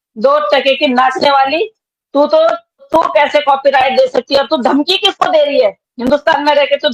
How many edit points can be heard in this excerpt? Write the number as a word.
one